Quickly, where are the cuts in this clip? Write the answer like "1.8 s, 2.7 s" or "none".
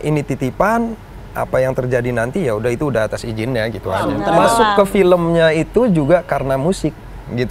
4.2 s